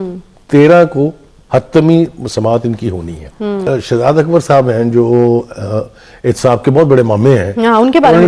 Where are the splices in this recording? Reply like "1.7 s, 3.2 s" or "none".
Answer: 3.6 s

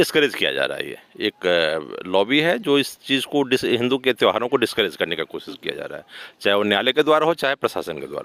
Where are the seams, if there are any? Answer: none

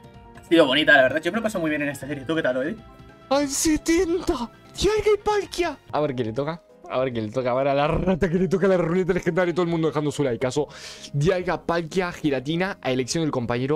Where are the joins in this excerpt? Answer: 5.9 s

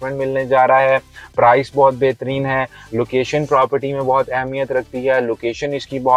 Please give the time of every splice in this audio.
none

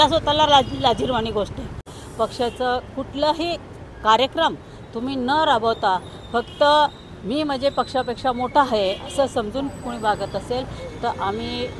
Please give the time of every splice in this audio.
1.9 s

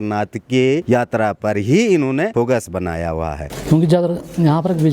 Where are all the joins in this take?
0.8 s, 2.3 s, 3.5 s

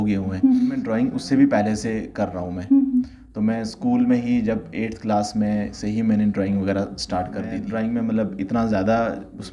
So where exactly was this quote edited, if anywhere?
0.9 s, 7.6 s

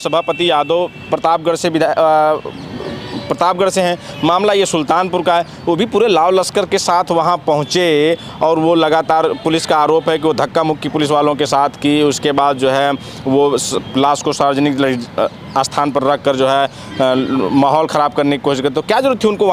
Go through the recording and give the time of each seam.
none

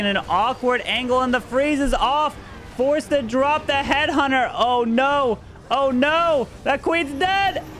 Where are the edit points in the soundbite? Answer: none

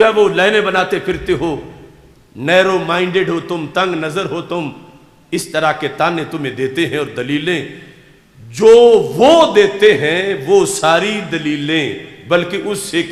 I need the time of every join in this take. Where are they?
none

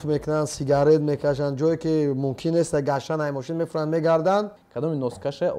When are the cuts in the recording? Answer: 4.6 s

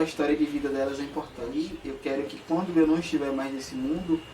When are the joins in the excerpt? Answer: 1.5 s

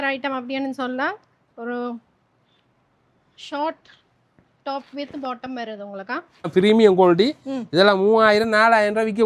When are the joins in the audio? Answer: 6.5 s

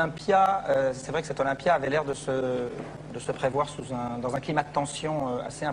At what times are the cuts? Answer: 3.2 s

